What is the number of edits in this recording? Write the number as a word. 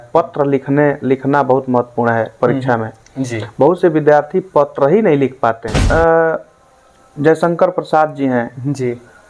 one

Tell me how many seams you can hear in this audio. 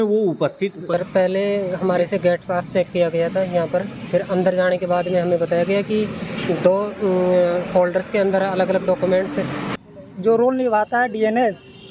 two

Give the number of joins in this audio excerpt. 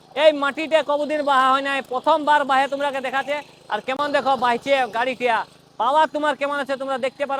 zero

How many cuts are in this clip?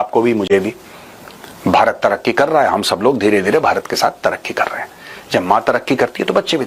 zero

